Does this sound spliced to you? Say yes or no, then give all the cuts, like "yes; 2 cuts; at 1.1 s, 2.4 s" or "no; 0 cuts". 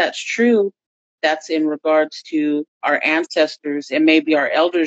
yes; 2 cuts; at 0.9 s, 2.8 s